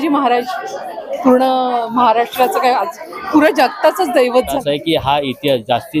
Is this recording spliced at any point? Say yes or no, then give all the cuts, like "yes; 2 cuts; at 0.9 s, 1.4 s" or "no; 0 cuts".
yes; 1 cut; at 4.6 s